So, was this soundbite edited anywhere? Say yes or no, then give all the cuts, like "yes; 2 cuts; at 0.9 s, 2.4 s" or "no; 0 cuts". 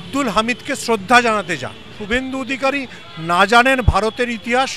yes; 1 cut; at 1.9 s